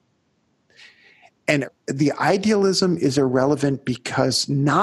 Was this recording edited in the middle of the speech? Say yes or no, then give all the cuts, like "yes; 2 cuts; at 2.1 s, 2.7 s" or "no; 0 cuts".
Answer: yes; 1 cut; at 1.6 s